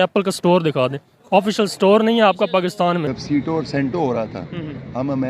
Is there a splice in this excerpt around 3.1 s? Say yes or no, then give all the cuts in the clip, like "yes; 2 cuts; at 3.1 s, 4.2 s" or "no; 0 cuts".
yes; 1 cut; at 3.1 s